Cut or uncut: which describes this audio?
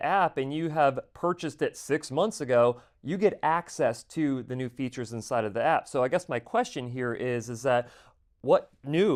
uncut